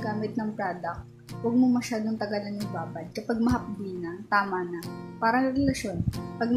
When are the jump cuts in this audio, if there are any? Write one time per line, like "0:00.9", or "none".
none